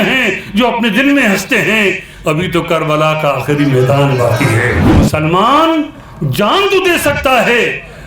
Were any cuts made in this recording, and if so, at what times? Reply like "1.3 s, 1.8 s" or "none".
4.8 s